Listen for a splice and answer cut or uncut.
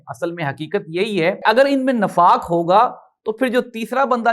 cut